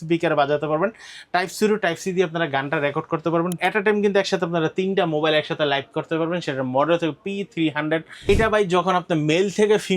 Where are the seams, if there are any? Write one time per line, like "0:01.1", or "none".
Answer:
0:03.6
0:08.3